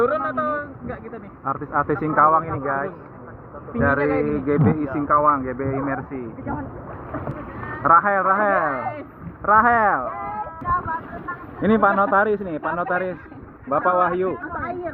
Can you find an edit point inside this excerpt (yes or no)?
yes